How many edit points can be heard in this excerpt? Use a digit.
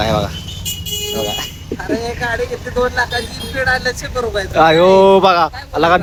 0